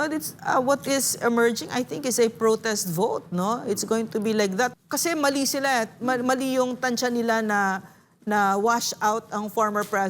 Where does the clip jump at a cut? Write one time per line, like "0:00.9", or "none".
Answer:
0:04.7